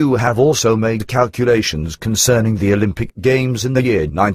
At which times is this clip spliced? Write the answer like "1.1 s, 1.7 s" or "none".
none